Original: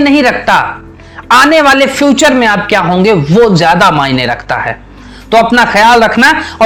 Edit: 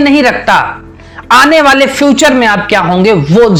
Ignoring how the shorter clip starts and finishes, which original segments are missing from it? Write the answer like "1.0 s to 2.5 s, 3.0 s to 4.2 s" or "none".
none